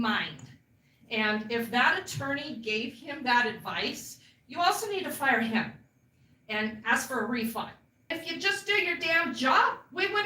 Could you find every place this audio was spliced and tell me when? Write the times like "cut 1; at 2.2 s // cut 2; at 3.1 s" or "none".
cut 1; at 8.2 s